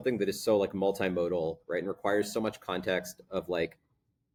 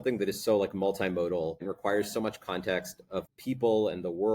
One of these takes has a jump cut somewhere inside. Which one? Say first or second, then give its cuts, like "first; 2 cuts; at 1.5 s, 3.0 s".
second; 2 cuts; at 1.6 s, 3.2 s